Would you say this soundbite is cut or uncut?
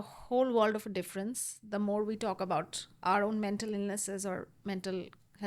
uncut